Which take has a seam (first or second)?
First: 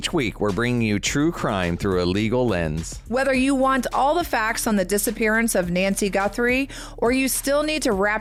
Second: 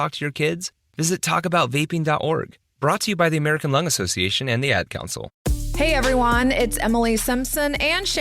second